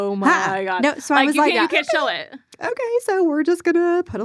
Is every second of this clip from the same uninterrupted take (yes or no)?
yes